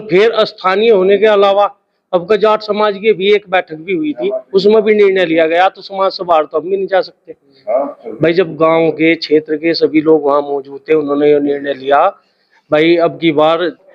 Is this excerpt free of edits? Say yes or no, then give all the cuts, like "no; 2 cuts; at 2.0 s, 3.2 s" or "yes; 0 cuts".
yes; 0 cuts